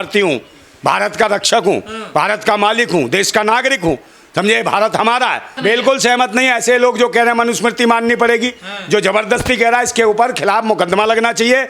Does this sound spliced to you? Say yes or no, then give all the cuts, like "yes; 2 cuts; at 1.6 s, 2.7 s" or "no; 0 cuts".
yes; 1 cut; at 5.5 s